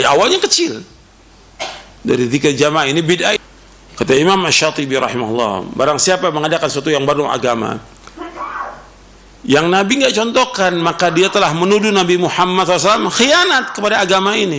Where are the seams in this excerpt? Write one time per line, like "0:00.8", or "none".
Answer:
0:03.4